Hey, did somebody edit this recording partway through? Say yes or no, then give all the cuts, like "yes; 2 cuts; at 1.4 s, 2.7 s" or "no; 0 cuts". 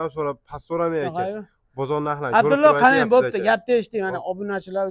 no; 0 cuts